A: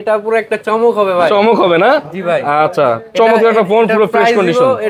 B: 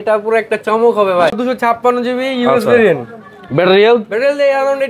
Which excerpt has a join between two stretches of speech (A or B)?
B